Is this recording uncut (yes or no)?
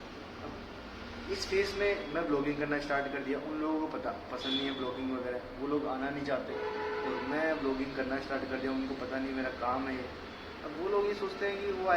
yes